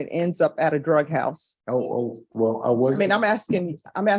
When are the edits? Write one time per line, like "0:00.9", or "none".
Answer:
0:01.5